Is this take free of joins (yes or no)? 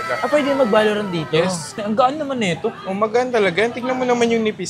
no